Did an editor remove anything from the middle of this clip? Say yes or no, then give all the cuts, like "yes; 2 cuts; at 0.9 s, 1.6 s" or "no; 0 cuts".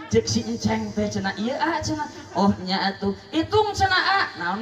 no; 0 cuts